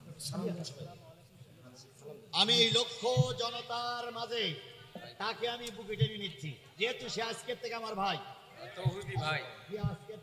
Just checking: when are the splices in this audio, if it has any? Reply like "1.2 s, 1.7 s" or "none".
none